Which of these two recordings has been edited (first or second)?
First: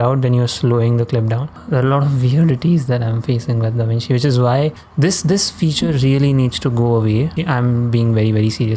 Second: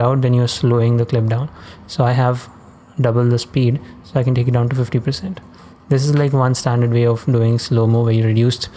first